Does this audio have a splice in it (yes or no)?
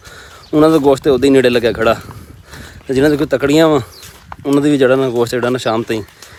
no